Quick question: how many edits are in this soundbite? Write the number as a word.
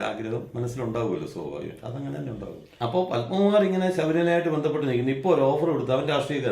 one